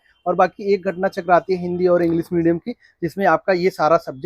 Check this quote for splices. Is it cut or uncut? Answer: uncut